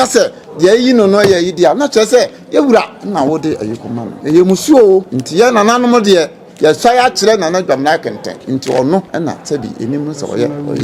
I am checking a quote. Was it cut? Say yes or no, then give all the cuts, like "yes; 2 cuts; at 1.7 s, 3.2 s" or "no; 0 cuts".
yes; 4 cuts; at 4.1 s, 5.2 s, 8.3 s, 9.1 s